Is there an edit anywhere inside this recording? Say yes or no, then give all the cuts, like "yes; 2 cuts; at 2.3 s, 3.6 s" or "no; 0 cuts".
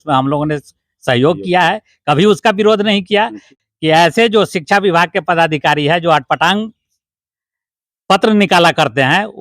yes; 1 cut; at 3.5 s